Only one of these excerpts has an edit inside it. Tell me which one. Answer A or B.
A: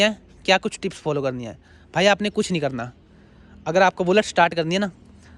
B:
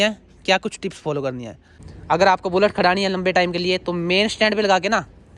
B